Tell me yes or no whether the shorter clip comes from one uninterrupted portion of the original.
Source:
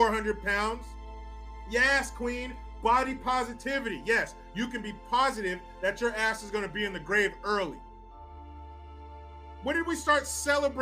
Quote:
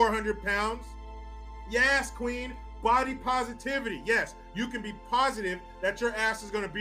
yes